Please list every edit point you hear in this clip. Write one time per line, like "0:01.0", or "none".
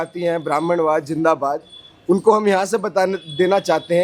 none